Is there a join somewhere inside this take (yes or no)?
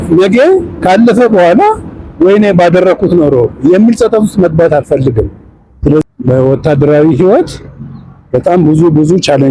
yes